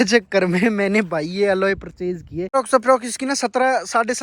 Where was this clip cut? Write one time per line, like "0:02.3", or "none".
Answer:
0:02.5